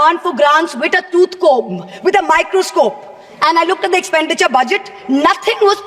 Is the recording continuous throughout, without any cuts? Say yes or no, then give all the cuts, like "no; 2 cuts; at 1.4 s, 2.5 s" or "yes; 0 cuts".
yes; 0 cuts